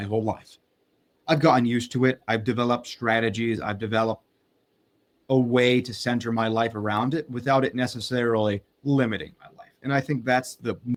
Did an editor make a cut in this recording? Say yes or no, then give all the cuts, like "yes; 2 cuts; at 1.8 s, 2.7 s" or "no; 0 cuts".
no; 0 cuts